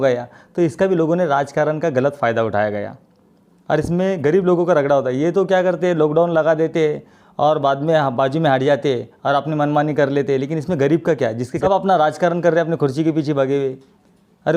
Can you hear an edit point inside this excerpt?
yes; 1 cut; at 11.5 s

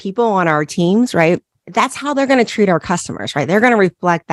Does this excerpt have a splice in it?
no; 0 cuts

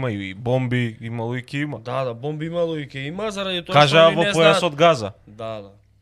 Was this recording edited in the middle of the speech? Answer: no; 0 cuts

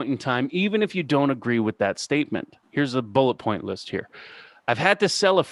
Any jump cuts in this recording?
yes; 1 cut; at 2.6 s

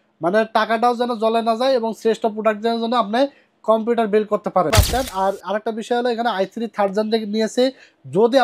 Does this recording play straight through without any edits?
no; 1 cut; at 4.7 s

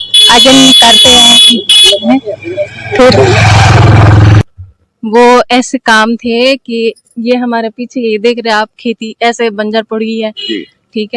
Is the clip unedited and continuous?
no; 1 cut; at 4.4 s

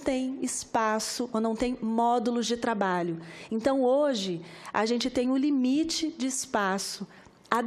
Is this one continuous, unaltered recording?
yes; 0 cuts

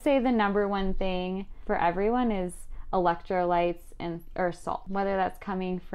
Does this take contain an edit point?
yes; 2 cuts; at 1.5 s, 4.8 s

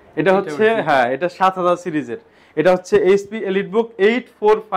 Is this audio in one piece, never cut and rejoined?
yes; 0 cuts

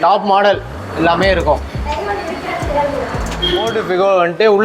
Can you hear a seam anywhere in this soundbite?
yes; 1 cut; at 3.7 s

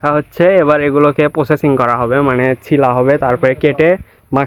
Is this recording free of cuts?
yes; 0 cuts

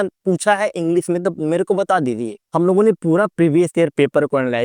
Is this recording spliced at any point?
yes; 1 cut; at 2.4 s

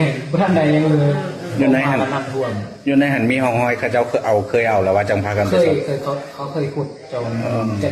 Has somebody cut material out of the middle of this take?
no; 0 cuts

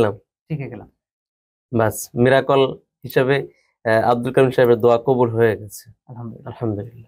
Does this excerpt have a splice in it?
no; 0 cuts

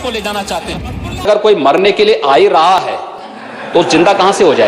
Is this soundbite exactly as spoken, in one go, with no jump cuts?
no; 1 cut; at 1.3 s

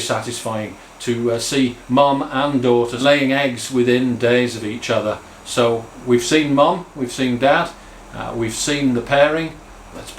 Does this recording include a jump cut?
yes; 1 cut; at 2.9 s

